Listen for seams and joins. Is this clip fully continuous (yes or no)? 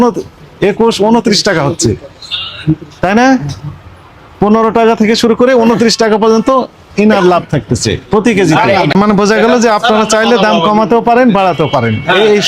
no